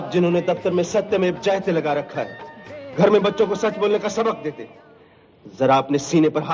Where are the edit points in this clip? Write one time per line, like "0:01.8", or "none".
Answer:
none